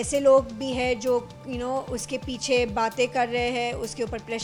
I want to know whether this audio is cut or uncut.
uncut